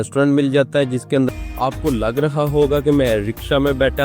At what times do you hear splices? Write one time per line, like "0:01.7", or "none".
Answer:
0:01.3